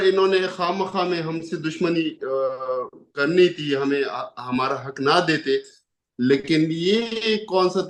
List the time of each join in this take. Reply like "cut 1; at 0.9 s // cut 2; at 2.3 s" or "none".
none